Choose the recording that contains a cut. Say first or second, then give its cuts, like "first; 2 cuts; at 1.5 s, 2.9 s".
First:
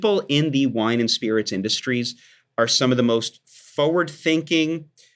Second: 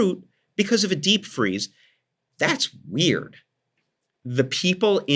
second; 1 cut; at 3.5 s